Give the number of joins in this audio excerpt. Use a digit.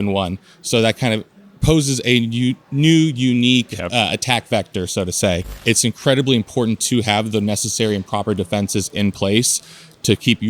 1